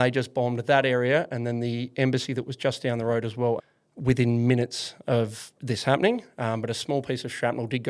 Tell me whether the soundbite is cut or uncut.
cut